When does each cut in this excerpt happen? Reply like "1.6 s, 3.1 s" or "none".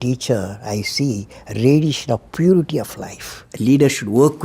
3.4 s